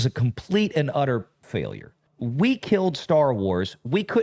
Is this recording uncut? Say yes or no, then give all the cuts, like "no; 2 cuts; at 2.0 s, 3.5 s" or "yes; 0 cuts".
no; 1 cut; at 1.5 s